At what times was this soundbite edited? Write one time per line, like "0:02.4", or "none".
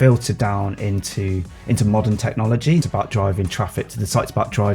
0:02.9